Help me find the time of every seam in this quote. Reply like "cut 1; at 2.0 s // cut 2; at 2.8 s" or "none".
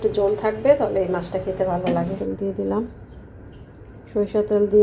cut 1; at 2.2 s